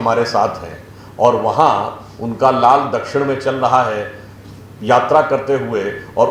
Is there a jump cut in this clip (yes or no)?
no